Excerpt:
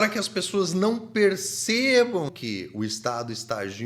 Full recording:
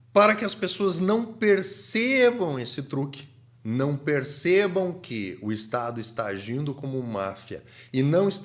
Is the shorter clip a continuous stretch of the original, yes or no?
no